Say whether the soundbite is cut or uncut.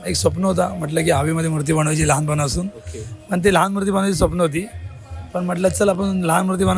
uncut